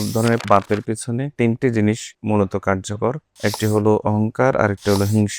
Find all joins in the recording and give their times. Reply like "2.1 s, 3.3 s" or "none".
1.3 s, 2.1 s, 3.3 s